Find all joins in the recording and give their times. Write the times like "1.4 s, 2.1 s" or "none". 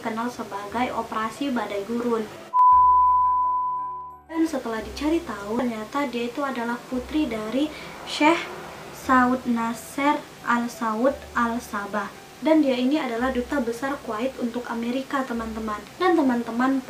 2.4 s, 4.4 s

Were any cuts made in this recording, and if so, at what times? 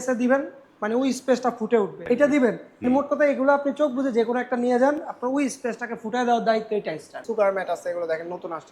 2.0 s, 2.7 s, 7.2 s

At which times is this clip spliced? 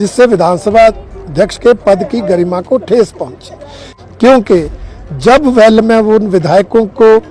3.9 s

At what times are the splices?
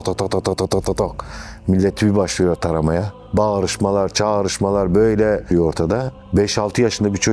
3.2 s, 5.4 s

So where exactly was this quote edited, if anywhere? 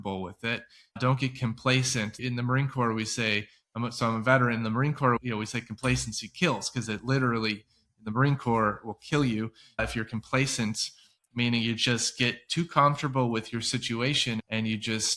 2.2 s, 5.2 s

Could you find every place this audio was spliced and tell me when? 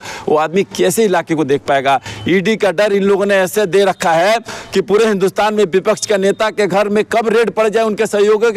none

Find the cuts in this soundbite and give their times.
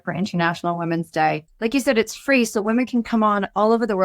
1.5 s

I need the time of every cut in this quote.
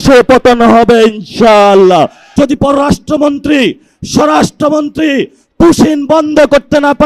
2.2 s

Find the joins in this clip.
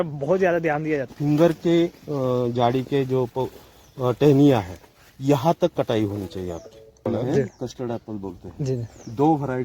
1.1 s, 7.1 s

